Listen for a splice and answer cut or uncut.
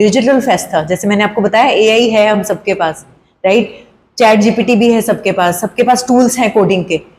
uncut